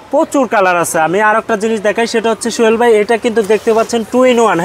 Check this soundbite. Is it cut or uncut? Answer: uncut